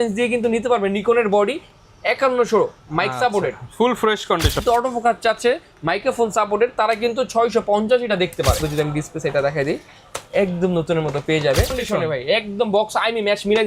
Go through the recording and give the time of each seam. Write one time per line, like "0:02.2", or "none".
0:04.6
0:08.6
0:11.8